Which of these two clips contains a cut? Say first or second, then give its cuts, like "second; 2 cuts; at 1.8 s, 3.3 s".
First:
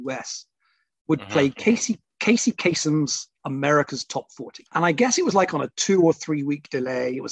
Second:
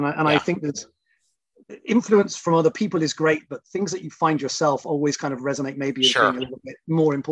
first; 1 cut; at 4.7 s